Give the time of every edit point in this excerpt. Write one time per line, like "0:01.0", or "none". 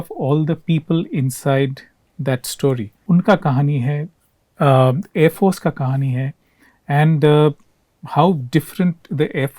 0:03.0